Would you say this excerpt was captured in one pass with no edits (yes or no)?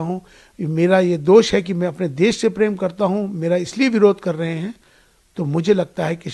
yes